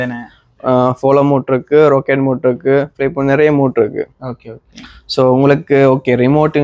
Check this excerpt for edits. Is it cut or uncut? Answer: uncut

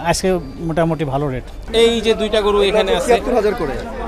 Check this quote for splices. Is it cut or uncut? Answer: cut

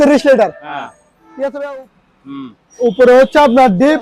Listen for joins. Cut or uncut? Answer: cut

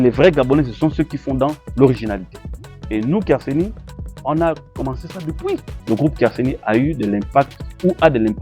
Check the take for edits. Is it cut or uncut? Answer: cut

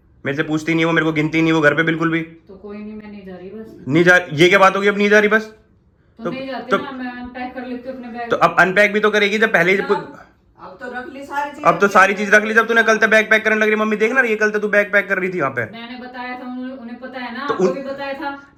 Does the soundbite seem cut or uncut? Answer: uncut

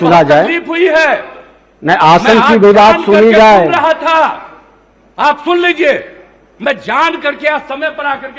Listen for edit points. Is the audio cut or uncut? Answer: uncut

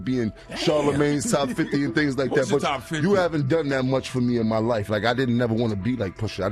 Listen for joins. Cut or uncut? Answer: uncut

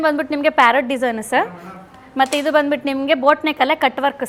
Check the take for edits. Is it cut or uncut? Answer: uncut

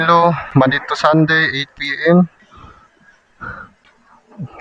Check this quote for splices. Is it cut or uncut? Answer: uncut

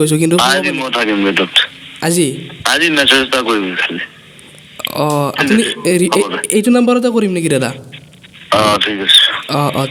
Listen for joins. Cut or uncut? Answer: uncut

